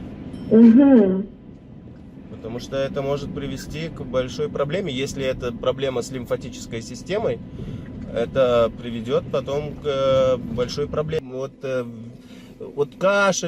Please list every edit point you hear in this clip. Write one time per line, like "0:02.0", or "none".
0:11.2